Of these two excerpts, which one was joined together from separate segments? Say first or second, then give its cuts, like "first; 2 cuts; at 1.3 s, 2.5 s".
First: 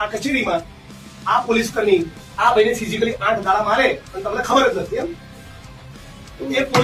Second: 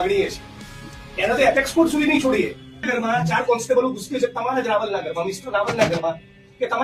second; 1 cut; at 2.9 s